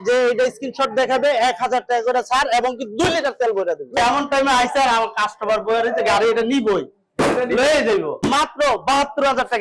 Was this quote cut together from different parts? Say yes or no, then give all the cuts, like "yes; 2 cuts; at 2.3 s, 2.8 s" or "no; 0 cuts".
yes; 2 cuts; at 4.0 s, 8.1 s